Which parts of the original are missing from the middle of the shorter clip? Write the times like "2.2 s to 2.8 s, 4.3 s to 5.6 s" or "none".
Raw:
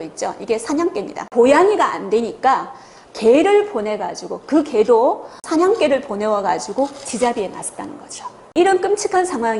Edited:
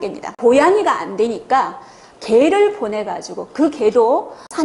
none

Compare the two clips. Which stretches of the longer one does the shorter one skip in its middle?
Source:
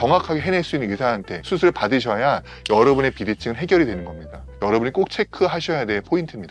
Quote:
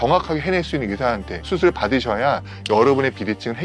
none

